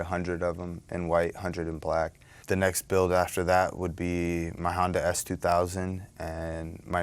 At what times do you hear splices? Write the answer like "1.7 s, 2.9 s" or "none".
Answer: 2.3 s